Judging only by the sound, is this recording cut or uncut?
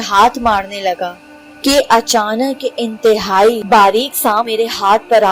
cut